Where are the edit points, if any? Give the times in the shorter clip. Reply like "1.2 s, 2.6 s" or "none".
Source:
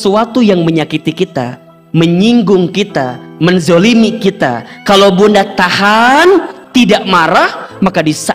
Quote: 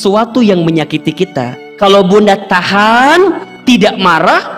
1.6 s